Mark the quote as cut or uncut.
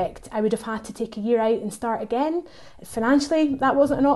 uncut